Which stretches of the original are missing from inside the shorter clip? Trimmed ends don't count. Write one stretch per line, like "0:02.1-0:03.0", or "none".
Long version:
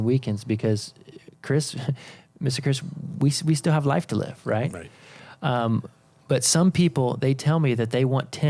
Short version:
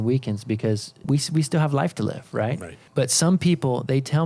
0:00.9-0:03.0
0:04.9-0:06.1

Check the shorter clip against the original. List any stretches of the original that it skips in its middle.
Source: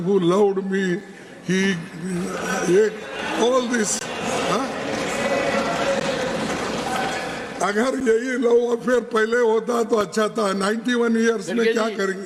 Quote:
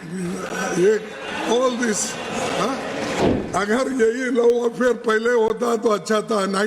0:05.1-0:07.3

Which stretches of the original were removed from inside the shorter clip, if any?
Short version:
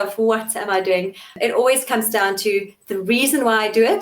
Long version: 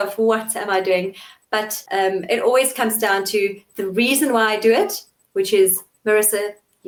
0:01.4-0:02.2

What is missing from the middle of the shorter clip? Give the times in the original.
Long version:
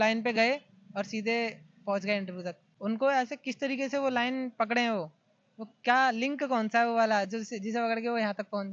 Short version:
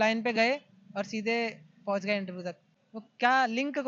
0:02.6-0:05.3

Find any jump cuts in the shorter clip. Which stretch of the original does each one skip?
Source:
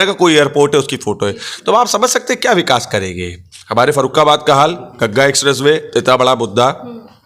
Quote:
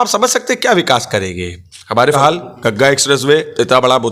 0:04.0-0:04.5

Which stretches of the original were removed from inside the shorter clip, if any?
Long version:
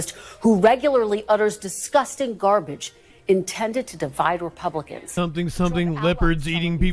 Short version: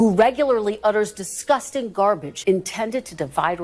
0:02.8-0:03.1

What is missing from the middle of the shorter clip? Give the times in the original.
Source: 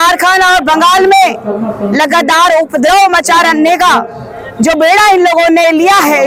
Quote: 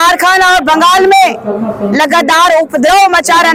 none

